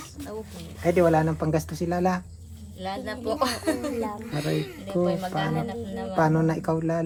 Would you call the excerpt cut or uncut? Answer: uncut